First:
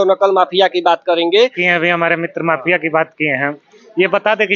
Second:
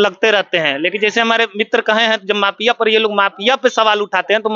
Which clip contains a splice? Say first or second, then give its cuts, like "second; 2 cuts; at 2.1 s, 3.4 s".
first; 1 cut; at 1.6 s